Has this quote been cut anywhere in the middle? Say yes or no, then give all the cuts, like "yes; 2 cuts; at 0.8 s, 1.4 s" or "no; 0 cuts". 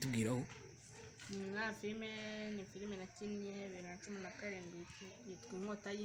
no; 0 cuts